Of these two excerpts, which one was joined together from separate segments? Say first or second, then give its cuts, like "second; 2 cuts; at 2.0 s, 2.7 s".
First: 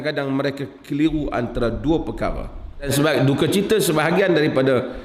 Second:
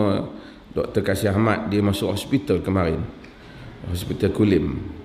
first; 1 cut; at 2.9 s